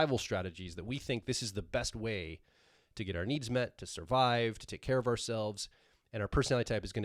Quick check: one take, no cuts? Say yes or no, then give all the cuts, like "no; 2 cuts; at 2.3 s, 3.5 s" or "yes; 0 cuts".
yes; 0 cuts